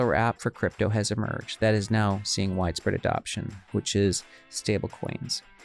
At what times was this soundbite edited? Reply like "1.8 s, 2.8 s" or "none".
none